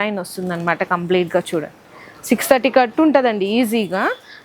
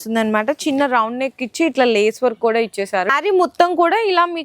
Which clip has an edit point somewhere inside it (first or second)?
second